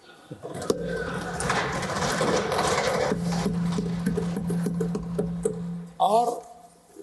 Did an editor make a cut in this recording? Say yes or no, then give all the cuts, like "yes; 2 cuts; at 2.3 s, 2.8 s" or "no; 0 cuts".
no; 0 cuts